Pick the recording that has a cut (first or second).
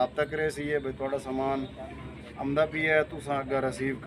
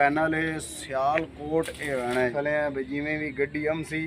second